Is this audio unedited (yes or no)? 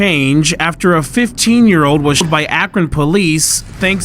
no